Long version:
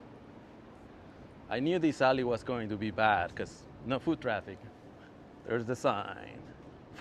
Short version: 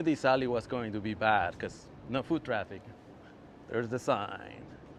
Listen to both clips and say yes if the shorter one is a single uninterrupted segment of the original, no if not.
yes